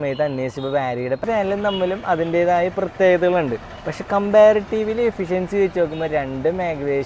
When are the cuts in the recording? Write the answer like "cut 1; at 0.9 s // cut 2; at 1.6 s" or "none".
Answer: cut 1; at 1.2 s

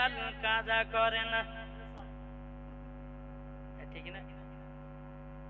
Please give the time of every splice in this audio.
none

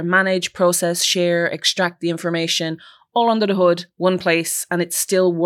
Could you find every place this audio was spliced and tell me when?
none

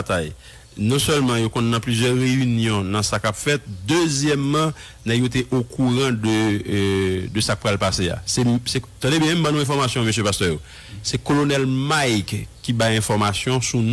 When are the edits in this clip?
none

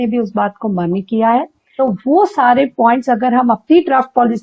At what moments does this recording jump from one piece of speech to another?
cut 1; at 1.6 s

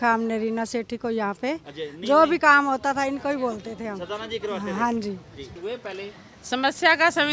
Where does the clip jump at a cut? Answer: cut 1; at 5.6 s

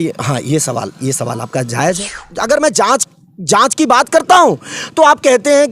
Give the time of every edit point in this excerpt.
cut 1; at 2.3 s

